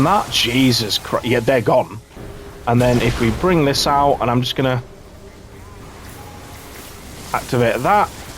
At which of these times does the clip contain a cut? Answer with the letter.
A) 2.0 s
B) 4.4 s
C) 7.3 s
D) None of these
A